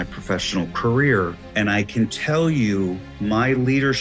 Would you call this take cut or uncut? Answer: cut